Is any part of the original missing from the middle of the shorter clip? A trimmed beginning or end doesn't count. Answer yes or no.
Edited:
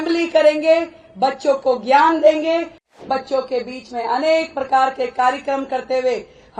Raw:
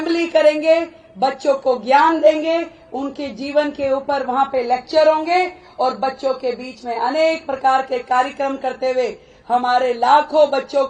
yes